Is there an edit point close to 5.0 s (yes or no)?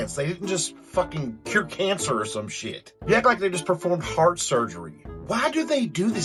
no